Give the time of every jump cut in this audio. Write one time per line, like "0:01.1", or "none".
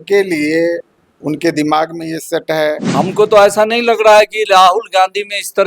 0:02.8